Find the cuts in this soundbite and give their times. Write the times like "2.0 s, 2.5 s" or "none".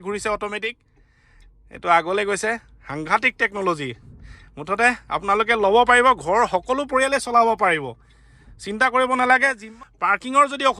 9.6 s